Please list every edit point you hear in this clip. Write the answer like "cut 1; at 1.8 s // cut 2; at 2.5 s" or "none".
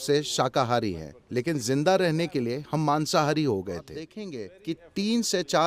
cut 1; at 4.2 s